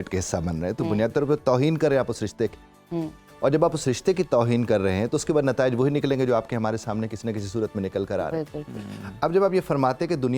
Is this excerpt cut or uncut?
uncut